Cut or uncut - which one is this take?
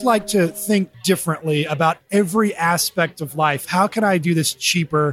cut